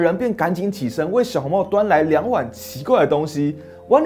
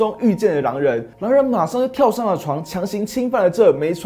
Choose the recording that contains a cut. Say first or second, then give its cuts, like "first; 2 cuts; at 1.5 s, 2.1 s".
second; 1 cut; at 1.1 s